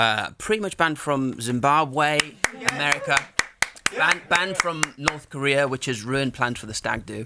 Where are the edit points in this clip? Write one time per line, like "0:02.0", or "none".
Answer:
none